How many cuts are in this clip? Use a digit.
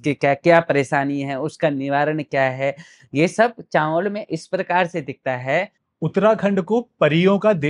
1